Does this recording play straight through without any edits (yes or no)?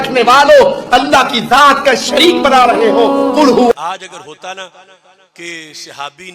no